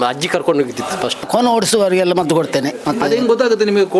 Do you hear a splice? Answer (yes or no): yes